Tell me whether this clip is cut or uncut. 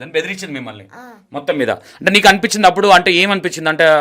uncut